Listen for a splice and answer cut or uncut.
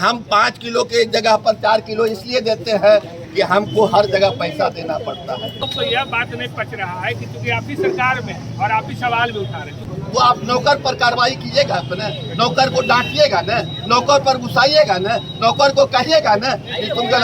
cut